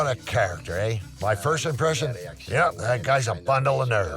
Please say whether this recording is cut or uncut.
cut